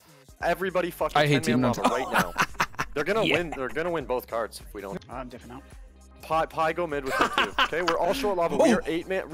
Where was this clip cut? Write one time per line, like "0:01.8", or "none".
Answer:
none